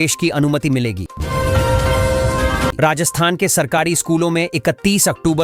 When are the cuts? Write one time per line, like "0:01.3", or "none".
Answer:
0:01.1
0:02.7